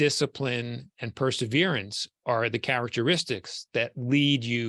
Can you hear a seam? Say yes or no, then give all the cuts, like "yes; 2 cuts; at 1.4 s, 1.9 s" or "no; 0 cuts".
no; 0 cuts